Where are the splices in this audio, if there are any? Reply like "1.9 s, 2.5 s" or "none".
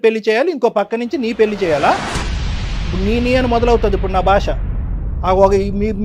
none